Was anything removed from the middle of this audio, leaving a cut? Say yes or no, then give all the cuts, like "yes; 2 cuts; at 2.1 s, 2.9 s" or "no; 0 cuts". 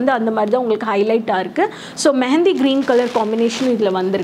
no; 0 cuts